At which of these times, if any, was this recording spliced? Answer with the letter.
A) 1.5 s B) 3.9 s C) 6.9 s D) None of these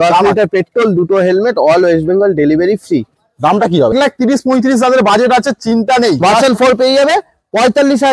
B